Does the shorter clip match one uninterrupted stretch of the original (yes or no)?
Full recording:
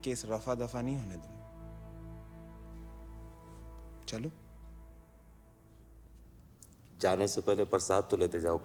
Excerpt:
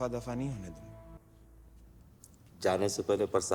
no